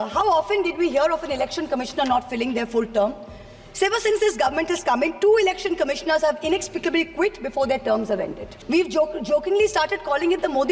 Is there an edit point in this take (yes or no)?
yes